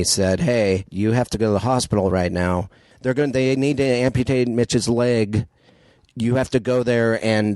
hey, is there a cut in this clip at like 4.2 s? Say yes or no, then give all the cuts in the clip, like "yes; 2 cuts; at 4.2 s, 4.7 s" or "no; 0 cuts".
no; 2 cuts; at 0.9 s, 2.9 s